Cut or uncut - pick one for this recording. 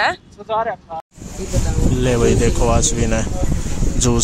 cut